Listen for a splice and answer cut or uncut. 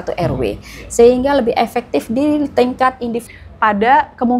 cut